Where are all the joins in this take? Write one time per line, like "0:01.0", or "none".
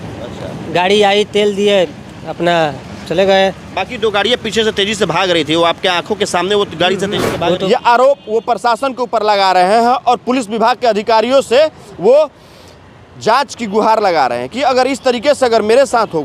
0:07.6